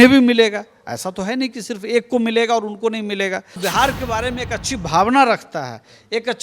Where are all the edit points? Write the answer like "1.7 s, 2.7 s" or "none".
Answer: 3.6 s